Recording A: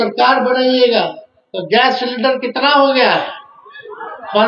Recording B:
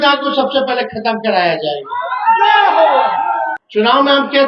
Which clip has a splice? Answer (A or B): B